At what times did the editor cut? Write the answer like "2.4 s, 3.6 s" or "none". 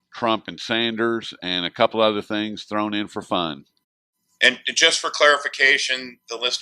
4.9 s